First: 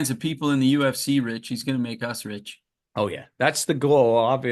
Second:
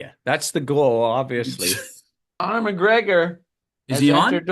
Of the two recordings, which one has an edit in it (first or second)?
second